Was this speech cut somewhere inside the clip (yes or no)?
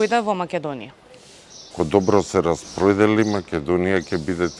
yes